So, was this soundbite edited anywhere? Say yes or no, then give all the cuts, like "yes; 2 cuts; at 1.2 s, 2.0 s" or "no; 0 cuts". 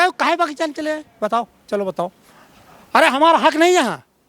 no; 0 cuts